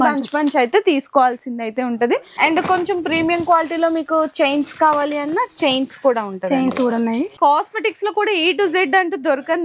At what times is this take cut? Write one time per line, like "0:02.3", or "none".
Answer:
0:02.2
0:07.3